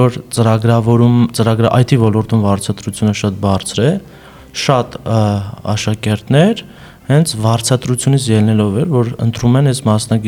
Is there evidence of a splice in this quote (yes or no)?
no